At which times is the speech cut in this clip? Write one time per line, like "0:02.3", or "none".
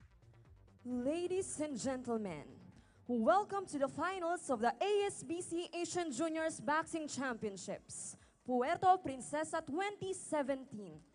none